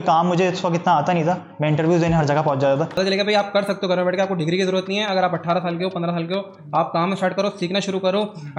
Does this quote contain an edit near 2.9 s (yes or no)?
yes